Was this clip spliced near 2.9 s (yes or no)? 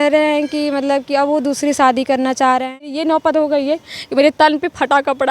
yes